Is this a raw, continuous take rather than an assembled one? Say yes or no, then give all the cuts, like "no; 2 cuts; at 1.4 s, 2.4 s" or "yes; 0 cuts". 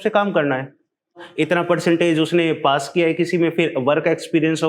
no; 1 cut; at 1.2 s